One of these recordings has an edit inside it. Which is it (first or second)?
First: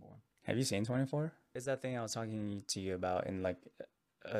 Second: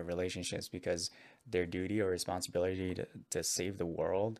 first